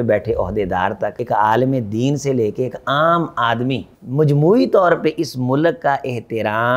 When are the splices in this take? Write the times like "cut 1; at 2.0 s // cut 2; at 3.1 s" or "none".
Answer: cut 1; at 1.2 s // cut 2; at 3.9 s